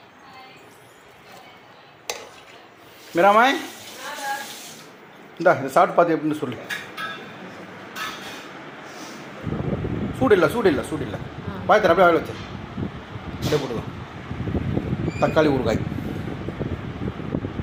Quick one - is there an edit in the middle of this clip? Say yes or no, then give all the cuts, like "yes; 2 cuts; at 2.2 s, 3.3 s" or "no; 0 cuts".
no; 0 cuts